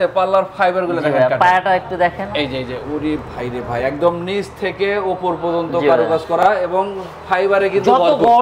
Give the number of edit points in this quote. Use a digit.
0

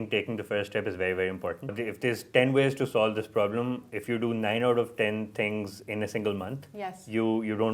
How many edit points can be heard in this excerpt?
1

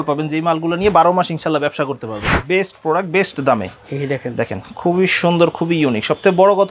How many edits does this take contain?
1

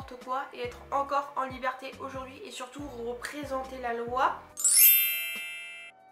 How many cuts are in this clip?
0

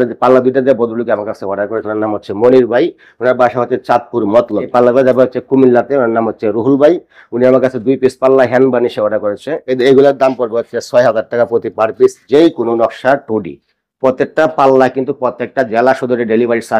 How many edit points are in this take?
2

